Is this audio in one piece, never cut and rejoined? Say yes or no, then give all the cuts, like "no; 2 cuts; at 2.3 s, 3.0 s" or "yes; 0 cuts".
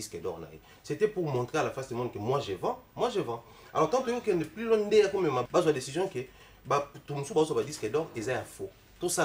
no; 1 cut; at 5.4 s